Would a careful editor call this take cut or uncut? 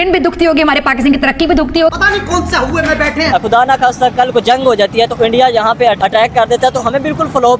cut